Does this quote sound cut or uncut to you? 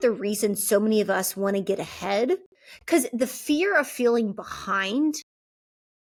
uncut